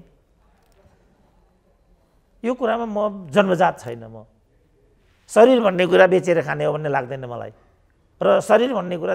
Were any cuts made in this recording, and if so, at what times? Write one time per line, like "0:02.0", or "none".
none

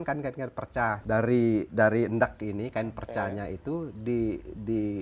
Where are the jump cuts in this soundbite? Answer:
0:01.0

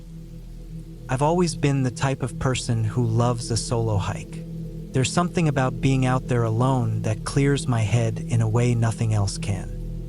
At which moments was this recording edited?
0:01.1

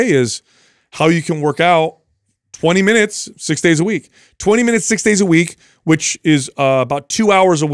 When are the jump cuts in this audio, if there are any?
none

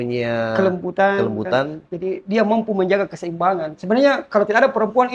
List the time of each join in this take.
none

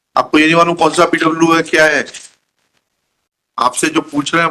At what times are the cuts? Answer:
0:03.5

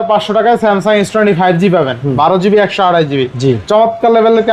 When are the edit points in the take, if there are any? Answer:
none

